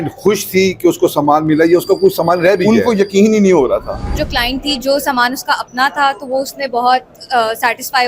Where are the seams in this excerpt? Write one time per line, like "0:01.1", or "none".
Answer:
0:04.2